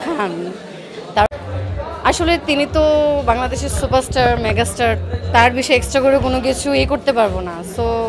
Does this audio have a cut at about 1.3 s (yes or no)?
yes